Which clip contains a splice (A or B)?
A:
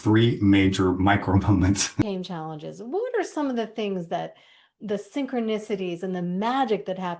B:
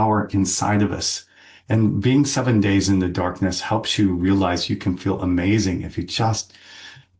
A